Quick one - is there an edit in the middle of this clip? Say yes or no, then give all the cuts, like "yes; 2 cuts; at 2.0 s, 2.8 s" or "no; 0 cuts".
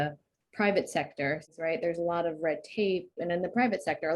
yes; 2 cuts; at 1.5 s, 3.2 s